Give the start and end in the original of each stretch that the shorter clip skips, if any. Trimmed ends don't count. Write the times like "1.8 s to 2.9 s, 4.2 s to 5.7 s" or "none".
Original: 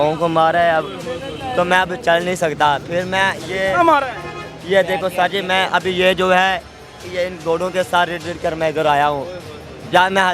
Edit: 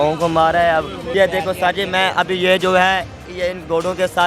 1.0 s to 4.5 s, 6.8 s to 7.0 s